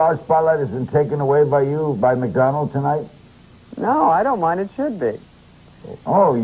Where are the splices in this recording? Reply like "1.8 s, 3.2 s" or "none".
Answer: 4.7 s